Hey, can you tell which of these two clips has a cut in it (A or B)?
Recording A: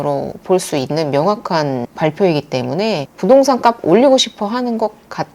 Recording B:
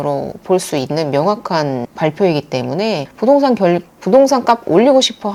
A